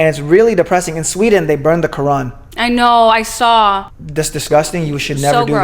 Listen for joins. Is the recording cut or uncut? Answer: cut